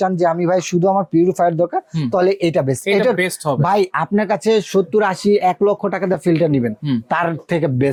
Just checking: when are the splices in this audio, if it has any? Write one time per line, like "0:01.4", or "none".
none